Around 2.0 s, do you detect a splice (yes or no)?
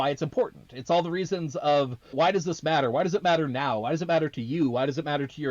yes